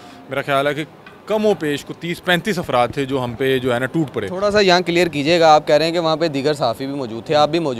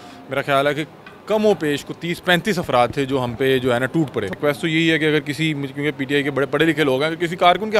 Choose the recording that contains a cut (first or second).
second